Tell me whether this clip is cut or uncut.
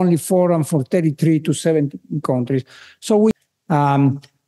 cut